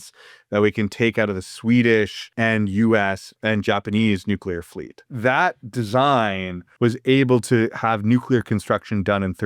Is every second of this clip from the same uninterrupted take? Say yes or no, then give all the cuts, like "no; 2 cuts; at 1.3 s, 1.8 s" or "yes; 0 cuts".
no; 4 cuts; at 2.2 s, 3.3 s, 5.1 s, 6.6 s